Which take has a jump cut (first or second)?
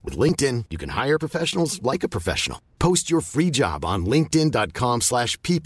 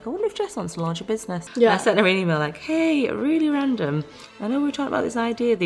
second